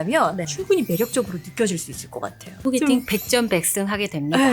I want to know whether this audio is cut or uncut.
cut